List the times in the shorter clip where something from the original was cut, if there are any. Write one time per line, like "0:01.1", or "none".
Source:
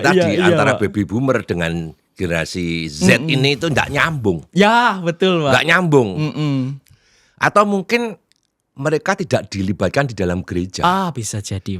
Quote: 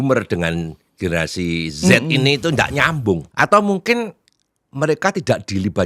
0:03.3